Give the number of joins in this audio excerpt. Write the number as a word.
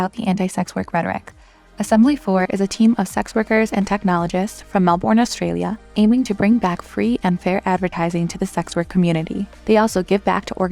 zero